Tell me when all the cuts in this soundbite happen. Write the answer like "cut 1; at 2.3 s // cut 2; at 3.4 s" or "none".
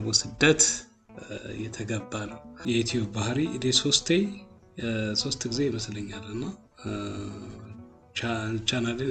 cut 1; at 2.5 s